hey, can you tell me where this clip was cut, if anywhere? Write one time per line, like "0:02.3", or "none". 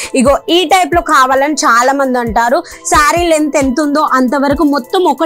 none